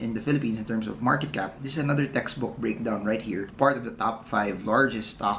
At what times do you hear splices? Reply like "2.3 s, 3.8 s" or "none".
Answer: 3.5 s